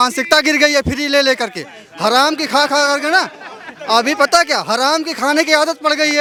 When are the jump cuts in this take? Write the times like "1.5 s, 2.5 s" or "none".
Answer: none